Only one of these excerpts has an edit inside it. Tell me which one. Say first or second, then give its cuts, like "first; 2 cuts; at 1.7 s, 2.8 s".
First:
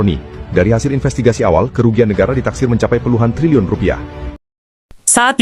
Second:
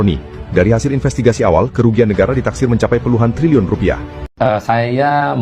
second; 1 cut; at 4.2 s